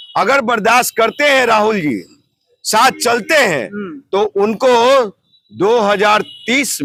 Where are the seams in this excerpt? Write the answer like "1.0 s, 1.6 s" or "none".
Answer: none